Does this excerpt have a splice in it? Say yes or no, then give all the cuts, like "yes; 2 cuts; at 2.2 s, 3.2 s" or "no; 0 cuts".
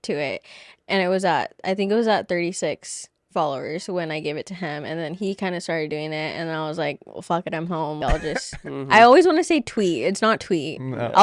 yes; 1 cut; at 8.0 s